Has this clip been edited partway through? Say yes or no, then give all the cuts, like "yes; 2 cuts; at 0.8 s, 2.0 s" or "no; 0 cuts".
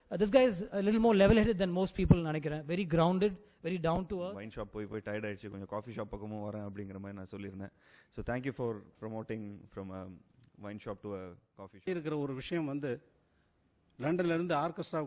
yes; 2 cuts; at 4.3 s, 11.9 s